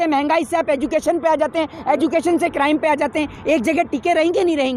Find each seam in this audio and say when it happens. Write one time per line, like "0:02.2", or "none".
none